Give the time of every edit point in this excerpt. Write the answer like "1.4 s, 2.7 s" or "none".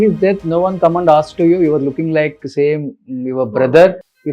none